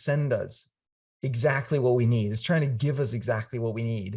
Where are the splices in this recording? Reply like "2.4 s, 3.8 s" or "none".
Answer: none